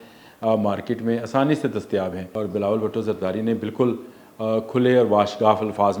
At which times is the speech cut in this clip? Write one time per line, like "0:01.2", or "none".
0:02.2

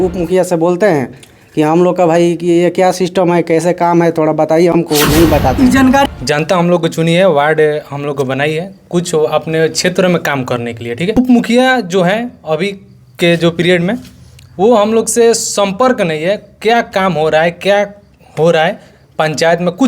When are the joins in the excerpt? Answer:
0:06.0
0:11.2

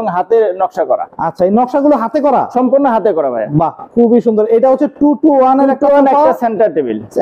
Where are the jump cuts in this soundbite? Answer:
none

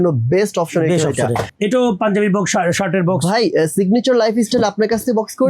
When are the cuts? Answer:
0:01.5

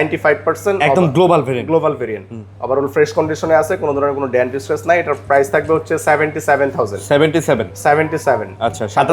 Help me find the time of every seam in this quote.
none

